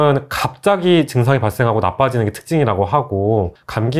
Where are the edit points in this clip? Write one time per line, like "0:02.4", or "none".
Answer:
none